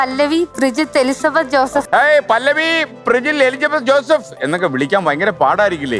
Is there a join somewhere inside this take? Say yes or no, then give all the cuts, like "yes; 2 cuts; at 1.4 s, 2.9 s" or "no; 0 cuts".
yes; 1 cut; at 1.9 s